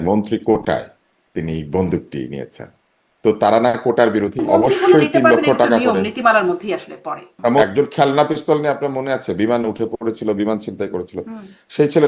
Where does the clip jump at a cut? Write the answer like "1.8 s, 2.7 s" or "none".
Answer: 4.4 s, 7.6 s